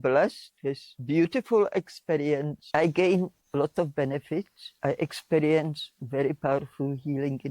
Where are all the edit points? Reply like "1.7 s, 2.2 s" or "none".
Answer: 0.9 s, 2.6 s, 4.6 s